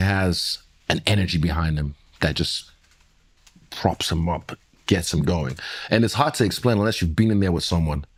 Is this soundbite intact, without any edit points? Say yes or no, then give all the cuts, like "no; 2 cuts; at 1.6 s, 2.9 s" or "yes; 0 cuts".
yes; 0 cuts